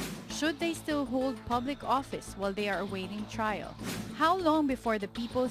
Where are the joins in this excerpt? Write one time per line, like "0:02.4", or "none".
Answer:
none